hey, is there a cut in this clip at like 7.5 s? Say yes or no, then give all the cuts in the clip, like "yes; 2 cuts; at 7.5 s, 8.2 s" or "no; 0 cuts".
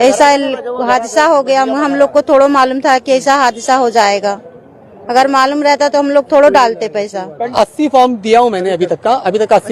yes; 1 cut; at 7.5 s